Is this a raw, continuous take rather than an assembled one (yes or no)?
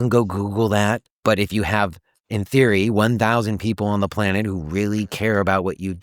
no